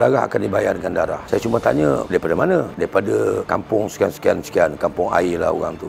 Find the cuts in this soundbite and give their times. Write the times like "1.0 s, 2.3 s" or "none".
none